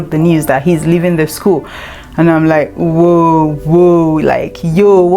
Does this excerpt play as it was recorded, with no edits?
yes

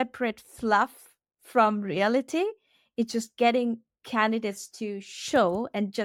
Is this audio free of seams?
yes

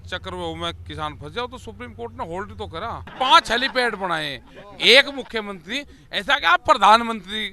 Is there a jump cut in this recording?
yes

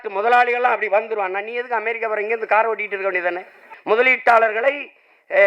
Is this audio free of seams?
no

